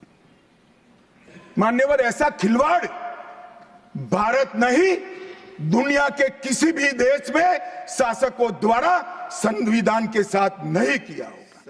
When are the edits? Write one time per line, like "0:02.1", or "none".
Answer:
none